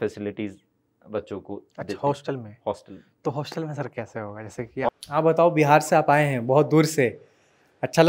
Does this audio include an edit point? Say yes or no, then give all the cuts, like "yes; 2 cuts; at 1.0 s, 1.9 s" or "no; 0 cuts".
yes; 1 cut; at 4.9 s